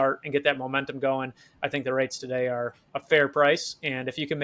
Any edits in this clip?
no; 0 cuts

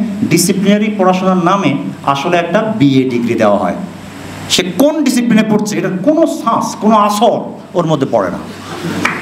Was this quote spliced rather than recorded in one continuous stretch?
no; 0 cuts

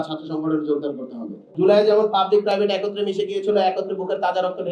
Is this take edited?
yes; 1 cut; at 1.3 s

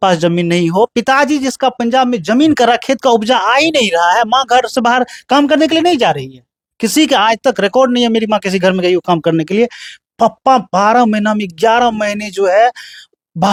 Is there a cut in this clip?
no; 0 cuts

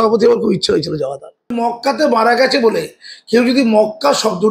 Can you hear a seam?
yes; 1 cut; at 1.5 s

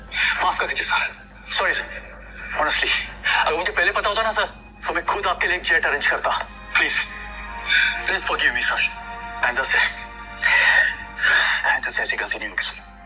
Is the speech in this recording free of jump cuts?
yes; 0 cuts

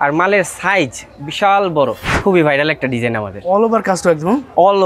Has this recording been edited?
yes; 1 cut; at 2.1 s

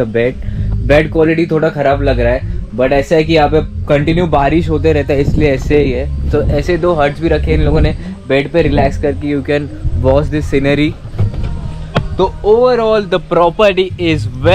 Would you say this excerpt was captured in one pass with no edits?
yes; 0 cuts

